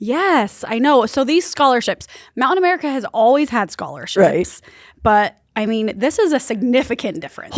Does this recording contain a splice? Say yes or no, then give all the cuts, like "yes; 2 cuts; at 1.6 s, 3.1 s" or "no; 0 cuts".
no; 0 cuts